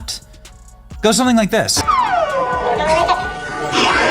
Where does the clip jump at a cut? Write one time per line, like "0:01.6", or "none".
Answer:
0:01.8